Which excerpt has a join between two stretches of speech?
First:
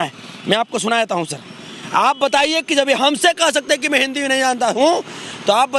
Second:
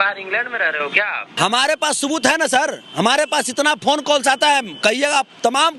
second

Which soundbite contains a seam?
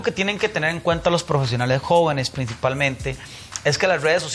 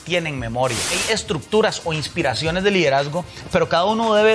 second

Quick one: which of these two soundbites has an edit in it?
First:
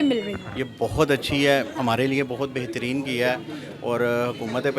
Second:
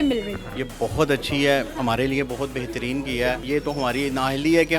second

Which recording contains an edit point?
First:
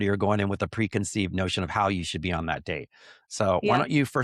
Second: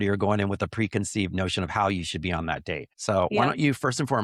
second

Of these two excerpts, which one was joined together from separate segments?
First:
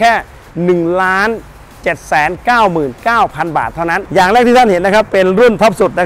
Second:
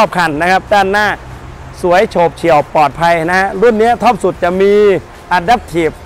first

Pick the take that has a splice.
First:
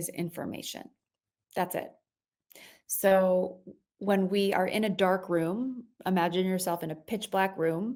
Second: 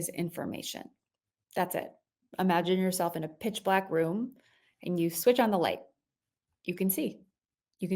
second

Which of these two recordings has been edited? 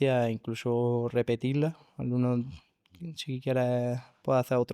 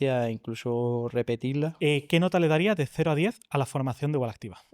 second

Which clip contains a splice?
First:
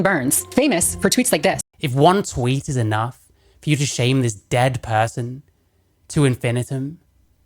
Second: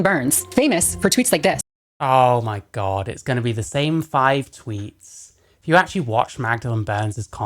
first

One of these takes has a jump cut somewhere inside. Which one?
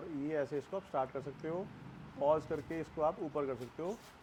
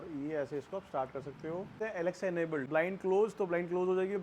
second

